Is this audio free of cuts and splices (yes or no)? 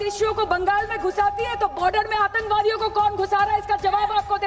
yes